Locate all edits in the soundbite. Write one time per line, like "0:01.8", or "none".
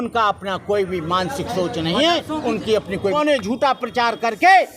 0:03.1